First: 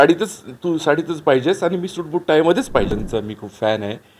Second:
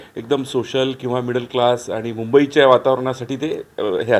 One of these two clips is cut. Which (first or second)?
first